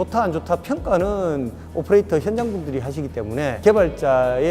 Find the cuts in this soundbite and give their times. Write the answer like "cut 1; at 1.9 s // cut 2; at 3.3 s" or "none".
cut 1; at 3.6 s